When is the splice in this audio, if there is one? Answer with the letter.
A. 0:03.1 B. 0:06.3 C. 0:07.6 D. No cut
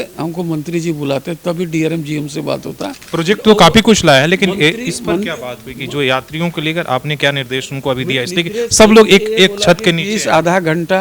A